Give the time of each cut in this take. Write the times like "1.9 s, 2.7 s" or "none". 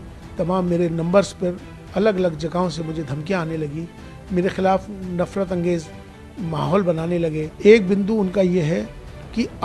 7.5 s